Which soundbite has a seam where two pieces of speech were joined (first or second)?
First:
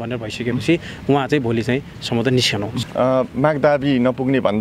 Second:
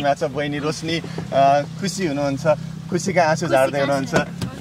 first